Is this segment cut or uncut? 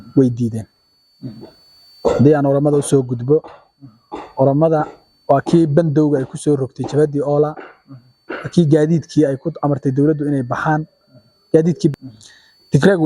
cut